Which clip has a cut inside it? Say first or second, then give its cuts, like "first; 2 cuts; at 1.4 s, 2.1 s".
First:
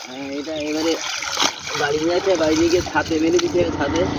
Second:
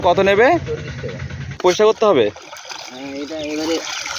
second; 1 cut; at 1.6 s